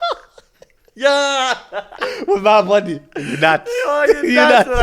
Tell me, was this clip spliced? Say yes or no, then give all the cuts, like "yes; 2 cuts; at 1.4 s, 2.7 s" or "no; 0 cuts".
no; 0 cuts